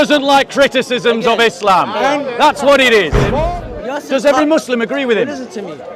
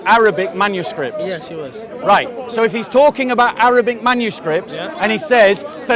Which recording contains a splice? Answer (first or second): first